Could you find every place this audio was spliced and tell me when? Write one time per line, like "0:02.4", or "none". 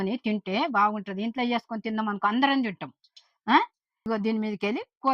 0:04.1

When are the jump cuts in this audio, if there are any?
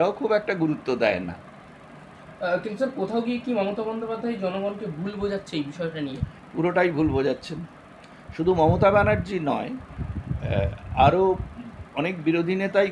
none

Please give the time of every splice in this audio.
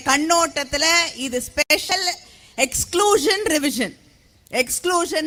none

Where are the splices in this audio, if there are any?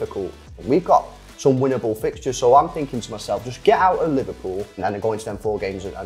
none

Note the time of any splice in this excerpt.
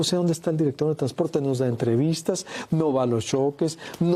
none

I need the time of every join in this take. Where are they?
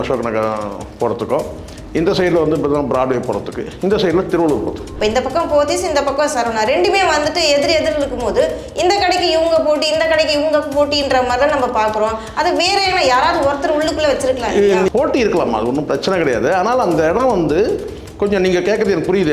0:04.9
0:14.9

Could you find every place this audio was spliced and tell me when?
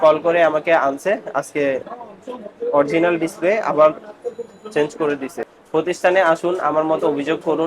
0:05.5

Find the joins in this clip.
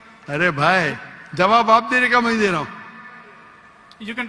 none

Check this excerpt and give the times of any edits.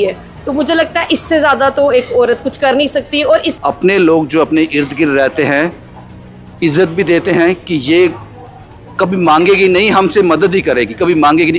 0:03.5

